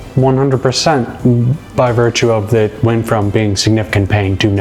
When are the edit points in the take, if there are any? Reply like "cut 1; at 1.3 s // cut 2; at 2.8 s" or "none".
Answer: none